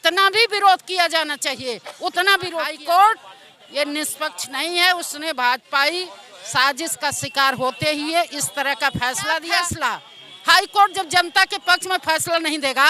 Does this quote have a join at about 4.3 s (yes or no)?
no